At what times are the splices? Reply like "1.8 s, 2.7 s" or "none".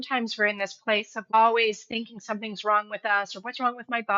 1.3 s

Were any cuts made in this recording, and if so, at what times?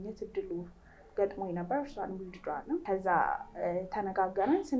2.8 s

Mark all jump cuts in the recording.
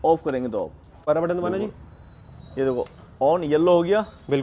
1.0 s

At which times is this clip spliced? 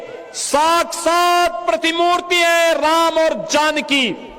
none

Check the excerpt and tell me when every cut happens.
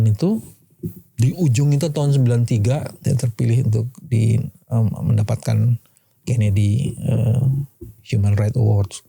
2.9 s

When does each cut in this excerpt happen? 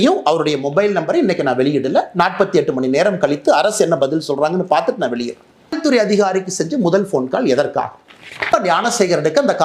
5.8 s, 8.5 s

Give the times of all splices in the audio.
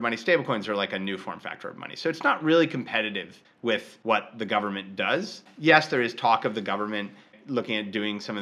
3.7 s, 5.5 s, 7.4 s

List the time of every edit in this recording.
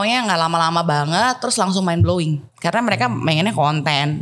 2.5 s

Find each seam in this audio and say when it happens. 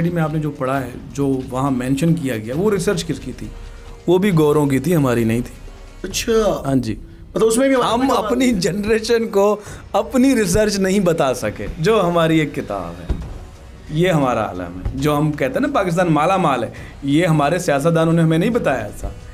none

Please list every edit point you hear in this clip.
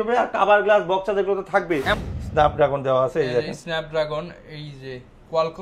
2.0 s

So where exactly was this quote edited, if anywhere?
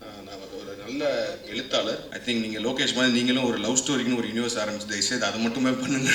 2.1 s

